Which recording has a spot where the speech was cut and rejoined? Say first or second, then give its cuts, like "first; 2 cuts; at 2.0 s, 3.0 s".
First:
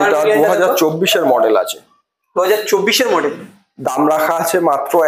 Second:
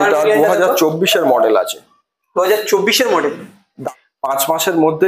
second; 1 cut; at 3.8 s